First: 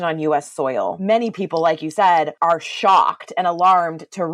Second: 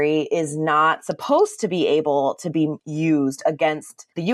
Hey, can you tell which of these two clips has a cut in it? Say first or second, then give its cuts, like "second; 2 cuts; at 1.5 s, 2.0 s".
first; 2 cuts; at 1.0 s, 2.3 s